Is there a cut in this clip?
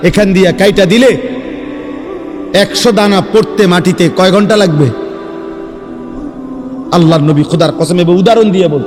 no; 0 cuts

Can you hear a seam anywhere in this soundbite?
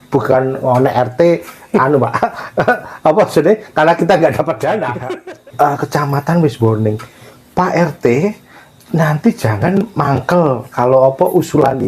yes; 1 cut; at 5.0 s

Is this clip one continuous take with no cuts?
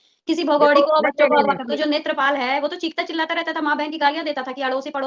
no; 1 cut; at 1.7 s

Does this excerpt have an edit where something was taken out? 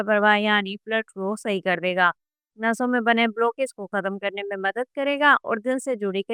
no; 0 cuts

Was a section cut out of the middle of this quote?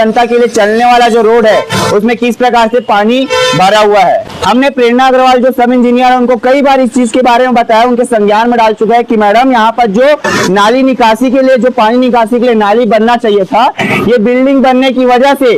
yes; 1 cut; at 4.3 s

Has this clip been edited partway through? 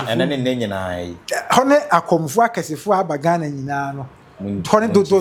no; 0 cuts

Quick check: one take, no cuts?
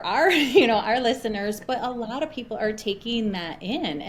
yes; 0 cuts

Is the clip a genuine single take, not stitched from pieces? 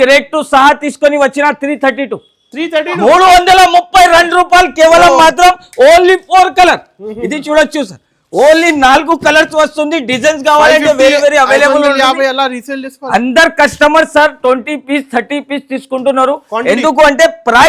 yes; 0 cuts

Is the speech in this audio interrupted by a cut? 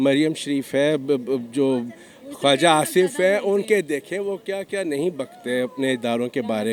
no; 0 cuts

